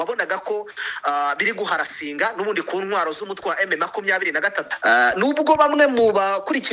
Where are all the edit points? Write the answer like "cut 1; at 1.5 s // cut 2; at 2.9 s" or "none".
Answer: cut 1; at 4.7 s